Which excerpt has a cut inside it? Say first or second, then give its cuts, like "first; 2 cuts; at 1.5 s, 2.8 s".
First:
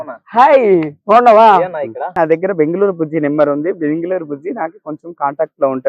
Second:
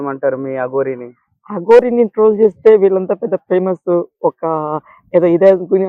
first; 1 cut; at 2.0 s